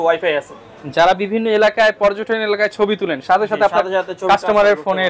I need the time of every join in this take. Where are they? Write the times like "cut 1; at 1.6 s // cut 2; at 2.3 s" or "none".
none